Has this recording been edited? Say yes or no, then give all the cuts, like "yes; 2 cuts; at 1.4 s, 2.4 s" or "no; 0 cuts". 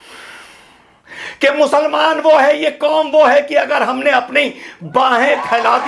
no; 0 cuts